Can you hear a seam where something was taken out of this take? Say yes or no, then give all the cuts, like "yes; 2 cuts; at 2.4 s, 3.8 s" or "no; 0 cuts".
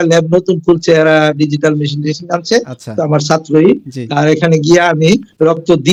no; 0 cuts